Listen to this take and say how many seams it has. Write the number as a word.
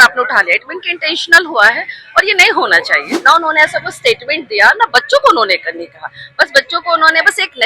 one